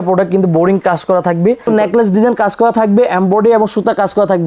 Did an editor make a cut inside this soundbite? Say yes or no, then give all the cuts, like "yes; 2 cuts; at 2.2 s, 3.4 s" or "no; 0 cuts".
yes; 1 cut; at 1.7 s